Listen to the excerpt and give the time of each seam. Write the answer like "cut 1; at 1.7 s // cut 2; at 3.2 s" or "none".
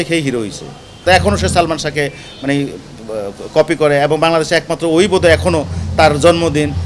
cut 1; at 1.0 s